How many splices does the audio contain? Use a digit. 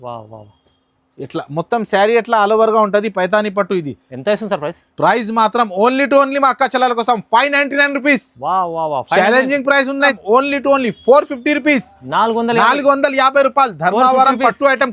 1